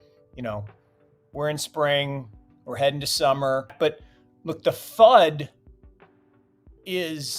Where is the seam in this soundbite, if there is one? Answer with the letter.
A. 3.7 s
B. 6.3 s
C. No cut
A